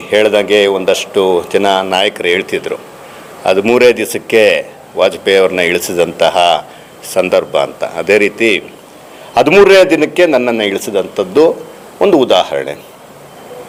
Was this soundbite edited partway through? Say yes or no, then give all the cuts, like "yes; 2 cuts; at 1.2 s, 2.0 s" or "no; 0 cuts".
no; 0 cuts